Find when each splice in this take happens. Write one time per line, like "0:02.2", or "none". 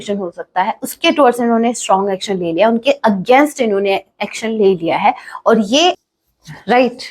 0:06.0